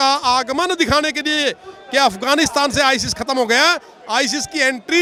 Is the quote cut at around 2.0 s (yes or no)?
no